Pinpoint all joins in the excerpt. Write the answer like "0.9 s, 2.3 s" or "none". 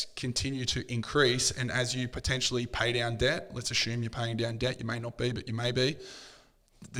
none